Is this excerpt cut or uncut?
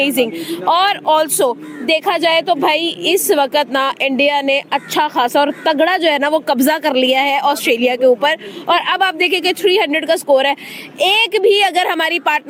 uncut